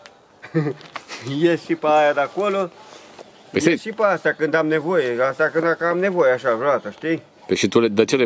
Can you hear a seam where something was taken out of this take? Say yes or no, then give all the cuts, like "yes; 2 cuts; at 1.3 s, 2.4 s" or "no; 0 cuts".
no; 0 cuts